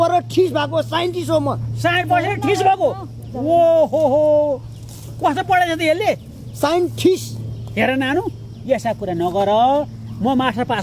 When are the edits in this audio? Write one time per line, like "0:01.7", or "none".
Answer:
none

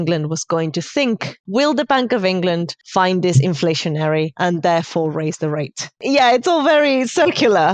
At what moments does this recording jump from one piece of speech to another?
0:01.3
0:02.8
0:04.3
0:06.0

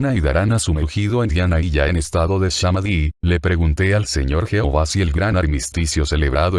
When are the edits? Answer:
0:03.1

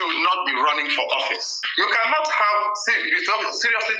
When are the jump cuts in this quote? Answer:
0:01.6

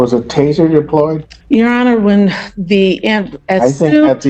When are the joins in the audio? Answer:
0:01.3

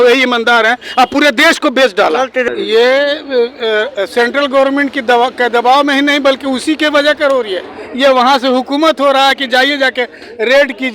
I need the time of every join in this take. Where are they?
0:02.5

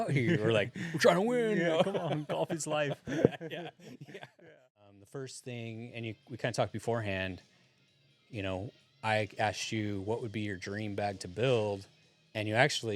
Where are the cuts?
0:04.8

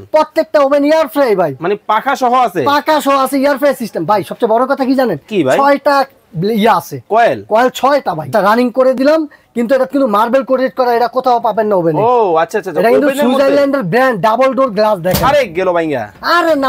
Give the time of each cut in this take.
0:08.3

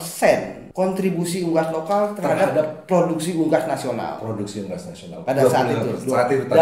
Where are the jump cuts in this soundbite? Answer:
none

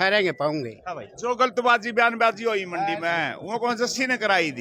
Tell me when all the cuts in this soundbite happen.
none

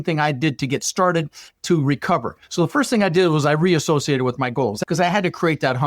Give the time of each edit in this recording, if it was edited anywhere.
0:04.8

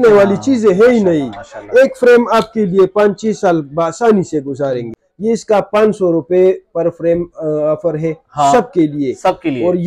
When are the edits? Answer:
0:05.0

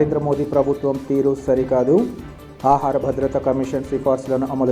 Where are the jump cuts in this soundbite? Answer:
none

